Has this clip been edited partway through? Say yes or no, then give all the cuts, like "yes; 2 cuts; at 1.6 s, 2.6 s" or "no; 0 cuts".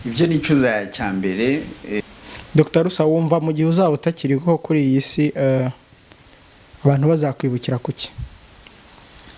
yes; 1 cut; at 2.0 s